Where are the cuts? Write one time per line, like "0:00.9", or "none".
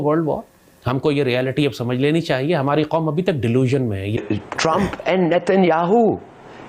0:04.2